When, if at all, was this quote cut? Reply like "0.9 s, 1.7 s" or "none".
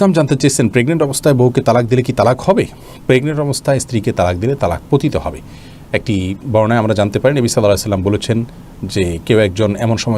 none

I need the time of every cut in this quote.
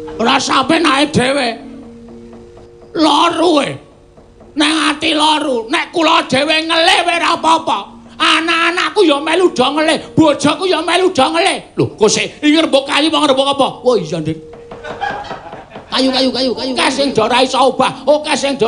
16.8 s

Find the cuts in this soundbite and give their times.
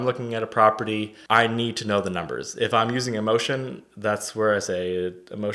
1.2 s

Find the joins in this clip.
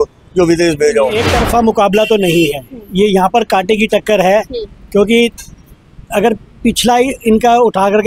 1.1 s

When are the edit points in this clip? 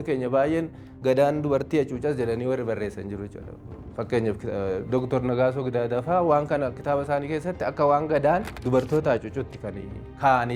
8.6 s

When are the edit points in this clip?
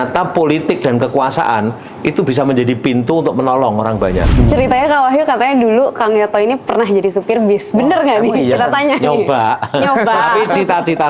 4.3 s

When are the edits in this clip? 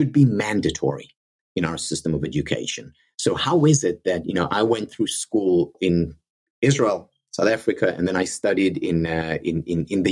5.7 s

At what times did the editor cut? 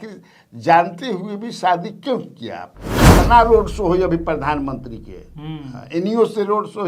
3.1 s

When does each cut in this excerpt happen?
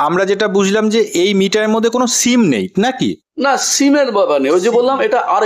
none

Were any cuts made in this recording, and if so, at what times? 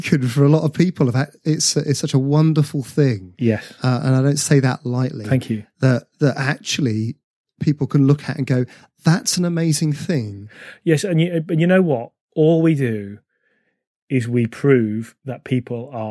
none

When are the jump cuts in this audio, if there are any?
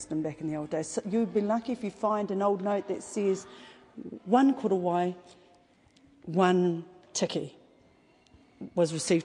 none

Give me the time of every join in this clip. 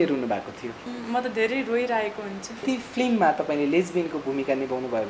0.9 s, 2.6 s

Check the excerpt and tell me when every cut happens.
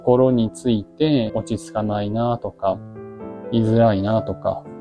1.3 s

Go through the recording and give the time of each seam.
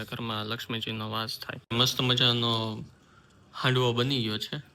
1.6 s

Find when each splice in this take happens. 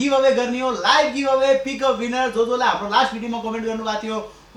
none

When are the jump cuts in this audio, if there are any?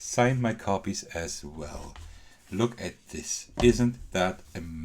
none

